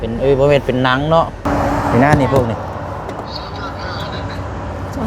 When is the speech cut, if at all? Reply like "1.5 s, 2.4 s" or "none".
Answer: 1.5 s